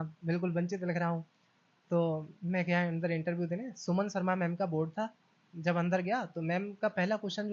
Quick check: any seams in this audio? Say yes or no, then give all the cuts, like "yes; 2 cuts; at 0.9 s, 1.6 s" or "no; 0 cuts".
no; 0 cuts